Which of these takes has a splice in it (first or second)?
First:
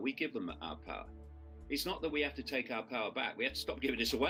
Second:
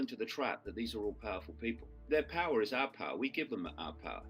second